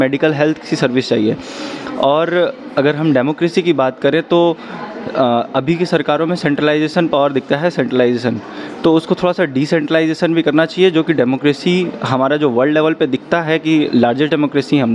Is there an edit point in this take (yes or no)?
no